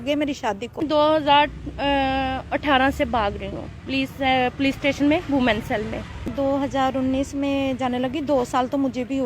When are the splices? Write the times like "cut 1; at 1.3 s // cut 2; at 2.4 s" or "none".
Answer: cut 1; at 0.8 s // cut 2; at 6.3 s